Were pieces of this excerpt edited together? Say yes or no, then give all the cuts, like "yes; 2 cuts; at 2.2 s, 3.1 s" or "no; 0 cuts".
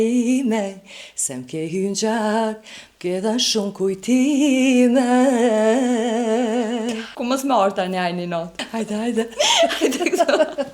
yes; 2 cuts; at 7.1 s, 8.7 s